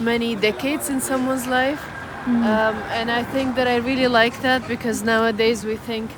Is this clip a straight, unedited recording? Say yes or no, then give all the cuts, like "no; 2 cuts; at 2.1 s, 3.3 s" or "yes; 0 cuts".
yes; 0 cuts